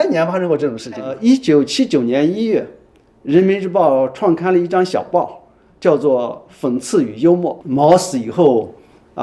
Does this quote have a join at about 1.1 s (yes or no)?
yes